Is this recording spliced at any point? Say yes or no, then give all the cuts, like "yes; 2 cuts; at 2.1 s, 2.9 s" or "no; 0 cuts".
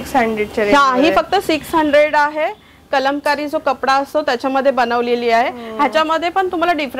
no; 0 cuts